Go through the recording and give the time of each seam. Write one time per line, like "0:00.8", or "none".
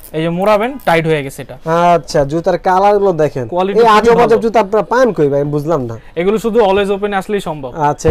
none